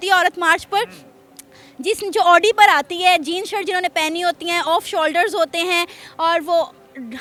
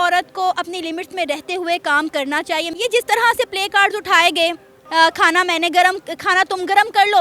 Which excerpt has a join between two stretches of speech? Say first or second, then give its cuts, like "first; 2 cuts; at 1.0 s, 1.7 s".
second; 2 cuts; at 2.7 s, 4.7 s